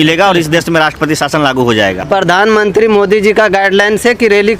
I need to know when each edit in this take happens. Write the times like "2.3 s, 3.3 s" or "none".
2.0 s